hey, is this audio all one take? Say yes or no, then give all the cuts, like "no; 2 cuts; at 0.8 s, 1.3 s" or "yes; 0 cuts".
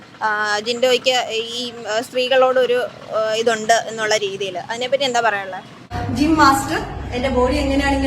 no; 1 cut; at 6.0 s